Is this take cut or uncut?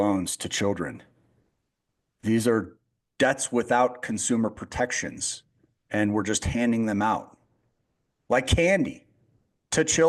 uncut